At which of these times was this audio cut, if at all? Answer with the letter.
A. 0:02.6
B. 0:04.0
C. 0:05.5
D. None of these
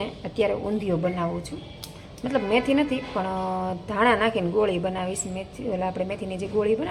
D